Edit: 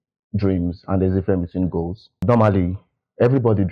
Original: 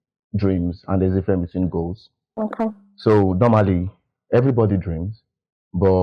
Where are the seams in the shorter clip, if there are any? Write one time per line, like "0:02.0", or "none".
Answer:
0:02.2

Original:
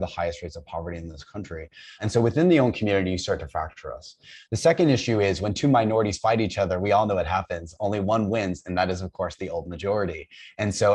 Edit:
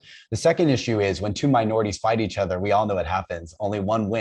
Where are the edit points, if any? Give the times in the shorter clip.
none

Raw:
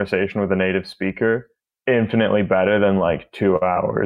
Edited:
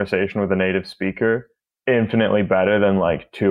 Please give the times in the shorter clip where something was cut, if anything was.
none

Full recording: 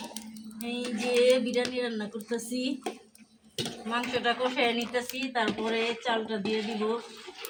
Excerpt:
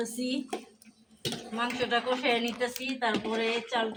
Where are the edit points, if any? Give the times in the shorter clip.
none

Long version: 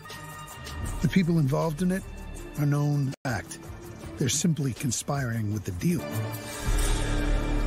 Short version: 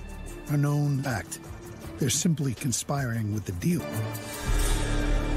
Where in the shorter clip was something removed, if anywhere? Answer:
0:01.0

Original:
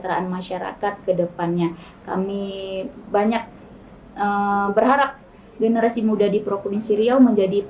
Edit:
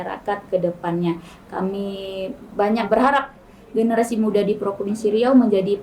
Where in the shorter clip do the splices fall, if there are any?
0:02.9

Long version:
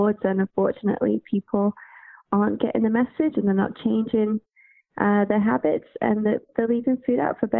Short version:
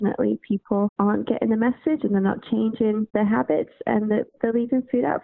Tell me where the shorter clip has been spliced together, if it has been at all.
0:00.9
0:03.1

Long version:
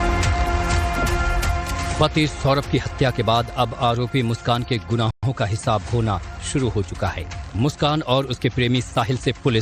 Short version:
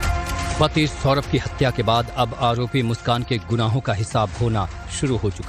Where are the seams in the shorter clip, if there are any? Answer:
0:03.7

